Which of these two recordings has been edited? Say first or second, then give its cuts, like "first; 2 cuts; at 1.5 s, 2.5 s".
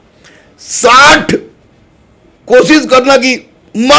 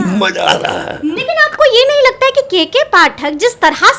second; 1 cut; at 1.2 s